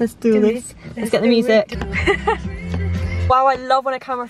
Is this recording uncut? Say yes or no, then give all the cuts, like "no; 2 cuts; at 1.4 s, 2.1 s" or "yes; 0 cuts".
no; 2 cuts; at 1.7 s, 3.3 s